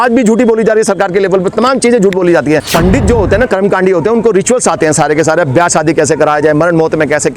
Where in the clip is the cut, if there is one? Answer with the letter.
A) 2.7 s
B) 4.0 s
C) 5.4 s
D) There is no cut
A